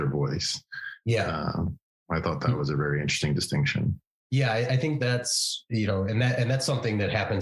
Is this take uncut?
yes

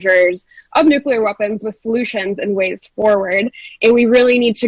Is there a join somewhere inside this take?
no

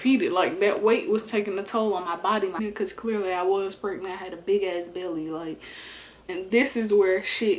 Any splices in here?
yes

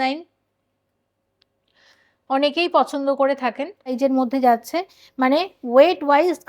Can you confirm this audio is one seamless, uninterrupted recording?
no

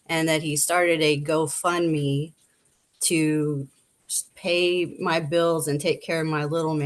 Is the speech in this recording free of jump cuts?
yes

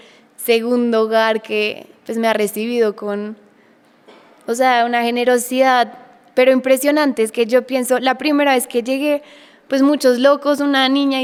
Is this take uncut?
yes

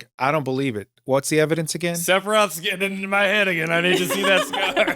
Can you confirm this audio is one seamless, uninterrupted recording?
no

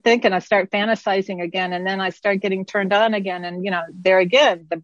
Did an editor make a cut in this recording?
no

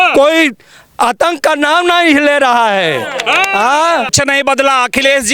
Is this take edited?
yes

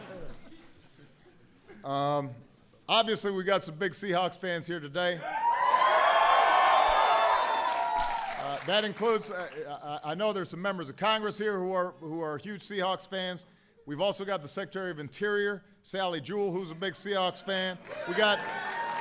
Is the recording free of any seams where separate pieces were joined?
no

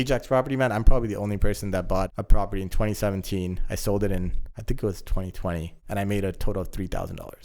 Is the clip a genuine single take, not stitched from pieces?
no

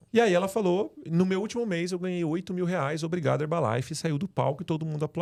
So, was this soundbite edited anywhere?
no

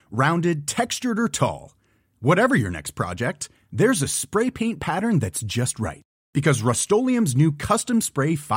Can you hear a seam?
no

